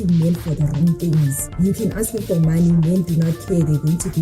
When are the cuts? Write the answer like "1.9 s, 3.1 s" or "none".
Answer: 1.4 s